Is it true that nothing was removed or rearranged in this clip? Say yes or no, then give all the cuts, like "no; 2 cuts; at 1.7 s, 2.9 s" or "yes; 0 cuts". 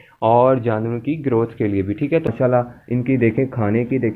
no; 1 cut; at 2.3 s